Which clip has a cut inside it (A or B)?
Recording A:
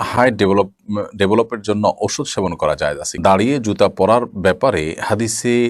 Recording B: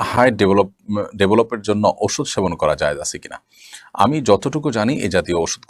A